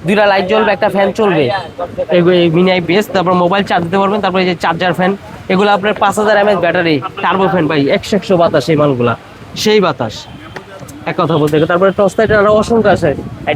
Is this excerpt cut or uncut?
uncut